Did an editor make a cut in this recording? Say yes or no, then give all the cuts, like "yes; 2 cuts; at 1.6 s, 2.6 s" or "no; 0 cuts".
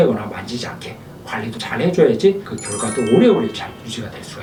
no; 0 cuts